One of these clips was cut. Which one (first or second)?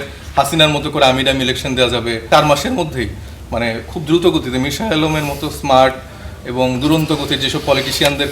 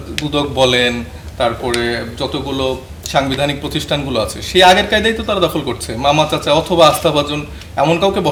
first